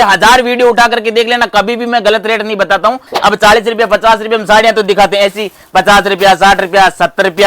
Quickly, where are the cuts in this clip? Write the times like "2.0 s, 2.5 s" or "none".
3.1 s